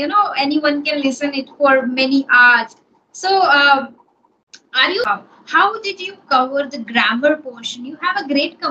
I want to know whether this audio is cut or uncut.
cut